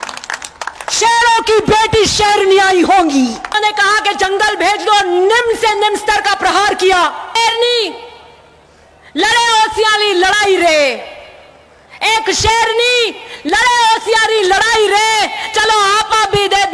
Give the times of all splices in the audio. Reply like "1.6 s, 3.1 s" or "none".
3.6 s, 7.4 s